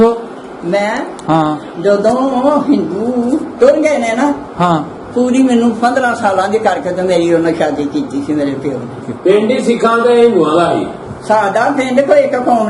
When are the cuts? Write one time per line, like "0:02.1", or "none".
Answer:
0:09.1